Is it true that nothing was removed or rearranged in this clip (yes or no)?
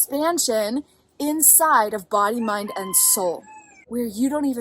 no